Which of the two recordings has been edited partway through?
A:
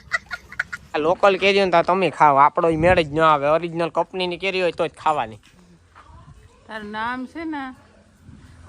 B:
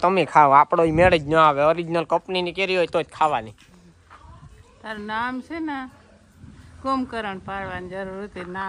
A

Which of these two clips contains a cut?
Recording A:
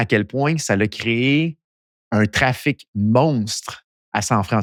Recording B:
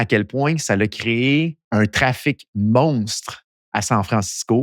B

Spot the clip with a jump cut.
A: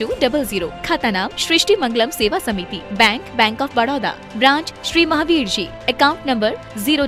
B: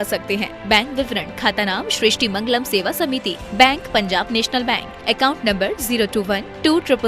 B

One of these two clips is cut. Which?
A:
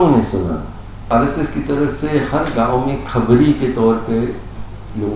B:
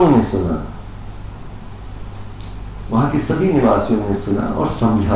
A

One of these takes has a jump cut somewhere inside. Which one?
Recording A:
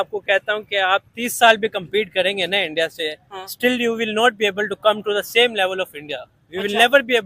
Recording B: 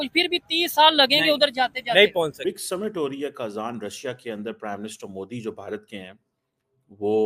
B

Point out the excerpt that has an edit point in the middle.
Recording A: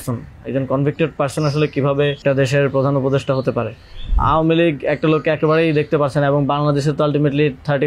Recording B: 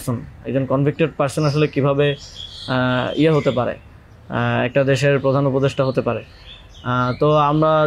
A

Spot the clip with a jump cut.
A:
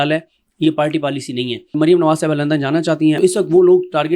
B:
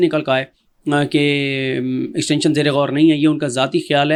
A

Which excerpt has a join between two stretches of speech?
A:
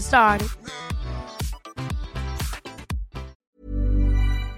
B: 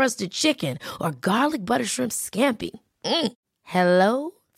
A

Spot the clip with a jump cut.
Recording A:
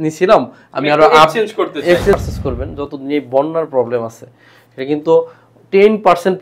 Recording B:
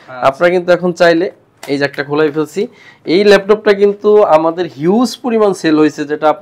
A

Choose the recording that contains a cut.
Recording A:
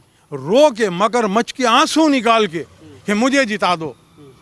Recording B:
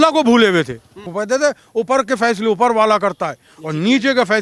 B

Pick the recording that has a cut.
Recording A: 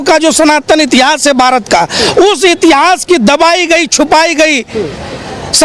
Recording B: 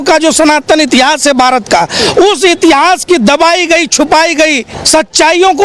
B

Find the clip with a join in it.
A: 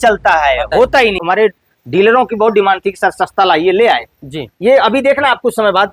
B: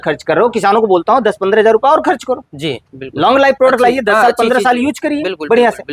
A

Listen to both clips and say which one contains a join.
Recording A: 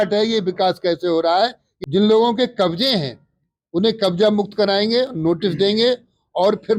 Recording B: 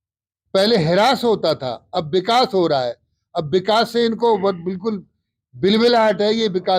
A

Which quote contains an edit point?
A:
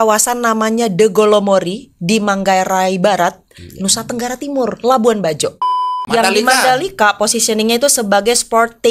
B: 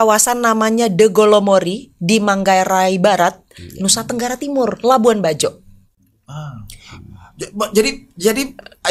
A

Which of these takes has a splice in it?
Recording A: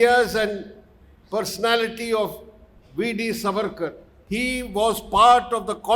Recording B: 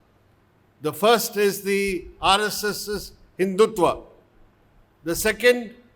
A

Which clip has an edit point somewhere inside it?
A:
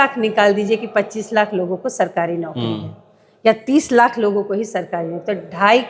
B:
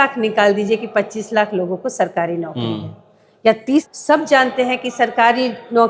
B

